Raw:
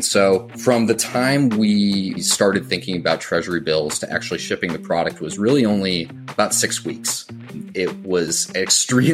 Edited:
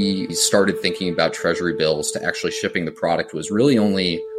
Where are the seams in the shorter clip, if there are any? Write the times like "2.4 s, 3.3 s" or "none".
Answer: none